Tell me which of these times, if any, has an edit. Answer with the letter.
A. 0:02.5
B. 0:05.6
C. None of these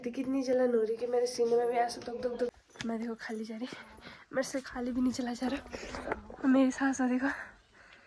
A